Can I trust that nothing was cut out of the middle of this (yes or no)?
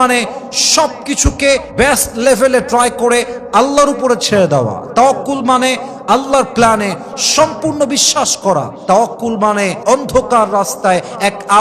yes